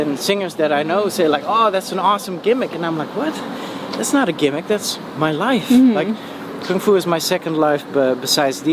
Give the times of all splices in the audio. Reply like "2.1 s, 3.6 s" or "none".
none